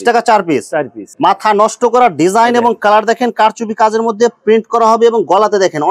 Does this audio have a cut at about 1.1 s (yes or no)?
yes